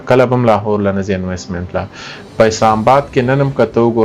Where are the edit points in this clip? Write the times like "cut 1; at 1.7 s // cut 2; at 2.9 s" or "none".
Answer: none